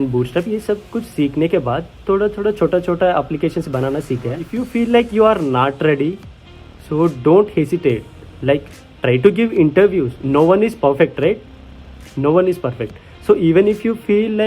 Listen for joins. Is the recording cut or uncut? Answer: cut